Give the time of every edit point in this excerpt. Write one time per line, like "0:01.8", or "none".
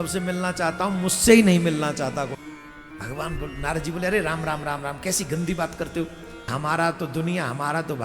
0:02.3
0:06.5